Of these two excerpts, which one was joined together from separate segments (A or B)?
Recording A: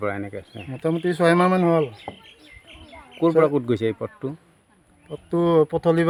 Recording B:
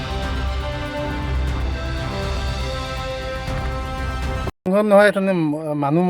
B